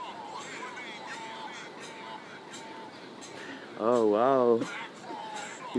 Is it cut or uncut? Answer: uncut